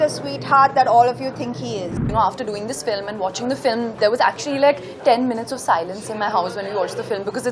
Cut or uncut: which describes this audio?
cut